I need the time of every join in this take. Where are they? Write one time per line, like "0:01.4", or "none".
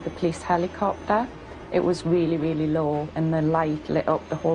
none